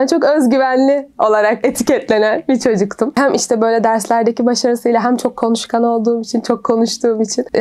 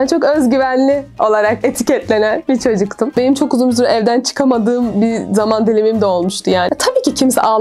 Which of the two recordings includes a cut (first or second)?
second